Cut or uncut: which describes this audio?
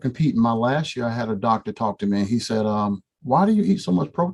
uncut